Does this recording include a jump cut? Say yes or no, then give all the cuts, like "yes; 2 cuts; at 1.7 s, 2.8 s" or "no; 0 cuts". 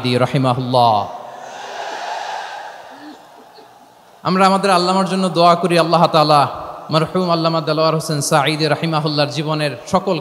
no; 0 cuts